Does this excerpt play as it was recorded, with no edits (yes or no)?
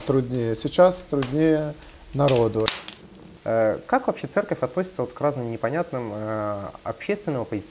no